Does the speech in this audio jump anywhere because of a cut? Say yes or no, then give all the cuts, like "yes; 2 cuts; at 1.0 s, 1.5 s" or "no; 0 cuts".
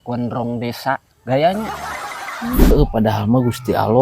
yes; 1 cut; at 2.7 s